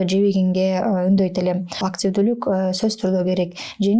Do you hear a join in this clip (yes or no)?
yes